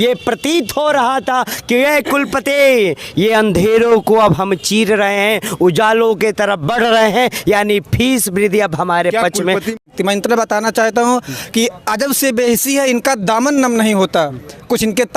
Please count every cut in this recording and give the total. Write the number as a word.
one